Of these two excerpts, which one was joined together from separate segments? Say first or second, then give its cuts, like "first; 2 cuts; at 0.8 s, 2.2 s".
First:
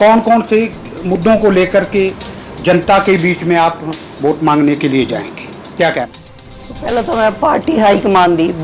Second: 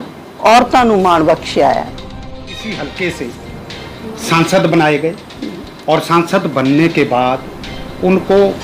second; 1 cut; at 2.0 s